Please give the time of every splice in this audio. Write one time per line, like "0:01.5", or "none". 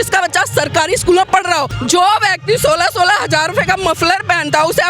0:01.7